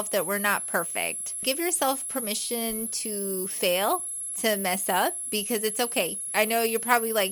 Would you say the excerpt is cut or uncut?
cut